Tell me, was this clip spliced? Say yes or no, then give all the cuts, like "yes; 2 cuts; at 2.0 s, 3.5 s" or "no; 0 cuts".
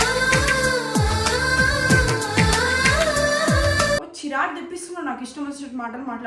yes; 1 cut; at 4.1 s